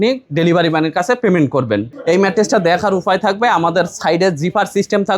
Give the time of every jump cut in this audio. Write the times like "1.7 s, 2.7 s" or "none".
1.9 s